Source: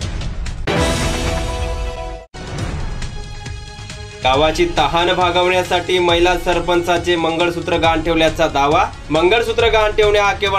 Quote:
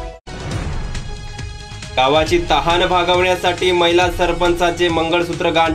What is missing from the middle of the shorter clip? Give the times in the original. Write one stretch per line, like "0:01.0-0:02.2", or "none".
0:03.9-0:04.1